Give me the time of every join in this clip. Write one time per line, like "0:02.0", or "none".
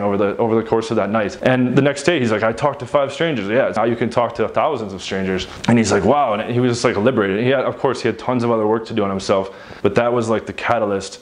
0:03.7
0:09.6